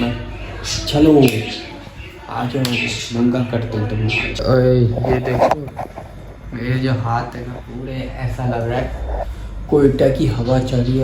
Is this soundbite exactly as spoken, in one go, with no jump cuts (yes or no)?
no